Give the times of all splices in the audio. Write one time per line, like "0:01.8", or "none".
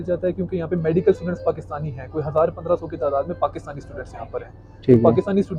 none